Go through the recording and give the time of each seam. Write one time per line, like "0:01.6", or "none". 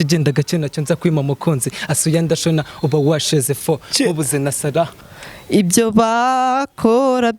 0:05.0